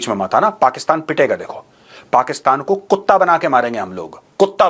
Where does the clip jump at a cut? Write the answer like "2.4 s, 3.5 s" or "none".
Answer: none